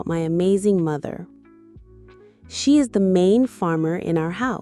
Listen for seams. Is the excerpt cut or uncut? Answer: cut